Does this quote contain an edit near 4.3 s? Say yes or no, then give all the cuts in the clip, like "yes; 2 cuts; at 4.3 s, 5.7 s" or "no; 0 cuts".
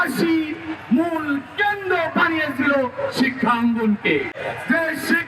yes; 1 cut; at 4.3 s